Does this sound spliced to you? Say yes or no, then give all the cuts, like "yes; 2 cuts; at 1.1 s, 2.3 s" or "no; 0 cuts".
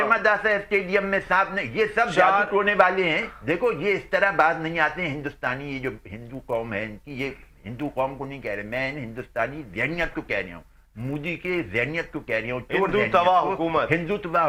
no; 0 cuts